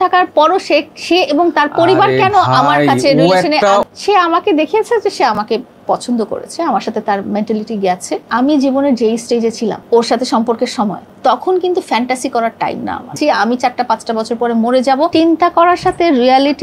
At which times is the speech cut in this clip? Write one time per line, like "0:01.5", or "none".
0:03.8
0:08.2
0:09.8
0:11.1
0:13.2
0:15.1